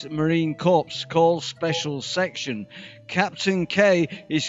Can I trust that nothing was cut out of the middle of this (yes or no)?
no